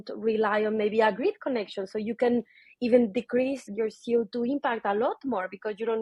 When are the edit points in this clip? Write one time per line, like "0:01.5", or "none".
none